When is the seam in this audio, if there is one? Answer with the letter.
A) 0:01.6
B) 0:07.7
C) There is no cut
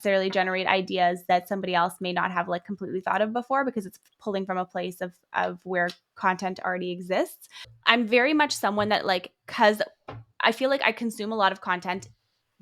B